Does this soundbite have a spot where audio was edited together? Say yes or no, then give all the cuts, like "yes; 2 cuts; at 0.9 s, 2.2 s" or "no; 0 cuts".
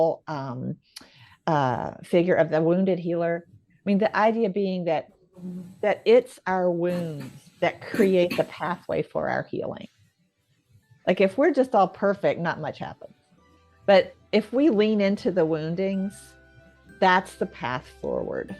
no; 0 cuts